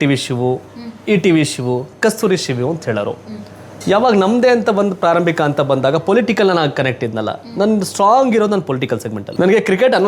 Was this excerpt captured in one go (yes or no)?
no